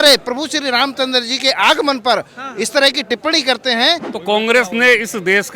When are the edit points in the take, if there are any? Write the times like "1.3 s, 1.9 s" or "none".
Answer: 4.1 s